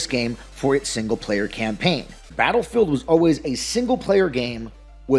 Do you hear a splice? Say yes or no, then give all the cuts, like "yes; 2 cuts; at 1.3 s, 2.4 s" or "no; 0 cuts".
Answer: yes; 1 cut; at 2.3 s